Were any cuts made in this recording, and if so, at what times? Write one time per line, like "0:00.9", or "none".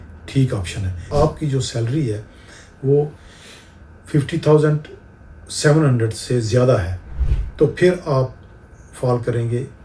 0:01.0